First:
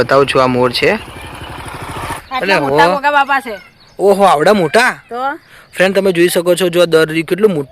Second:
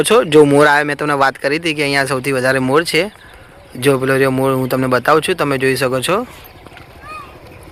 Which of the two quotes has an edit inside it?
first; 1 cut; at 2.1 s

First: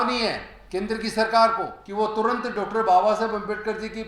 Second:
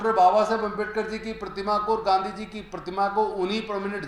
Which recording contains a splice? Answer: first; 1 cut; at 1.8 s

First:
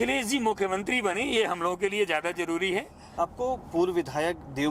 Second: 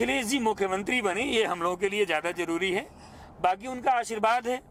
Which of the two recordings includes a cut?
first; 1 cut; at 3.0 s

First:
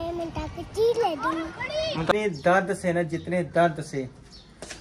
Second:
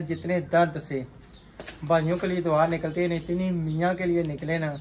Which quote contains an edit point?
first; 1 cut; at 2.1 s

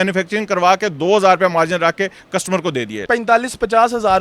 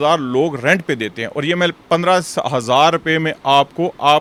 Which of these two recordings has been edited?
first; 1 cut; at 2.9 s

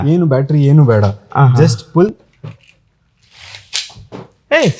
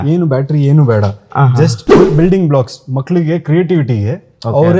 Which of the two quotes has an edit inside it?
second; 1 cut; at 2.1 s

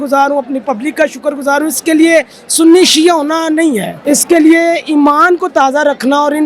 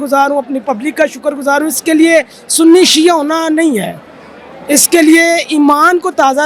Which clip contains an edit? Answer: first; 1 cut; at 3.9 s

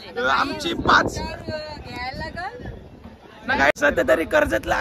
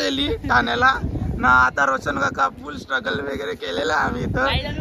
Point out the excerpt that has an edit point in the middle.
first; 1 cut; at 3.7 s

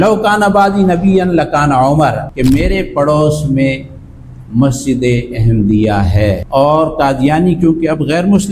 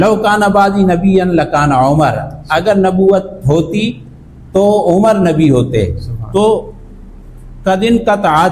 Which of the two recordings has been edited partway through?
first; 1 cut; at 2.3 s

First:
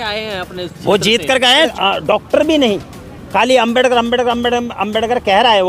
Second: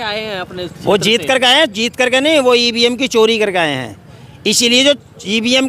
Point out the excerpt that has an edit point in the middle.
first; 1 cut; at 1.7 s

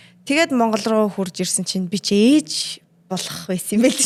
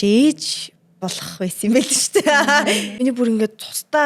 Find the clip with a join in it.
second; 1 cut; at 2.9 s

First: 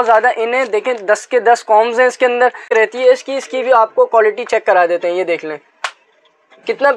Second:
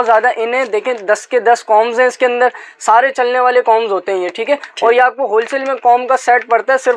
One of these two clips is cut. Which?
first; 1 cut; at 2.6 s

